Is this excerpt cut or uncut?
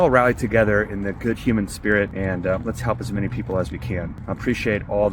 cut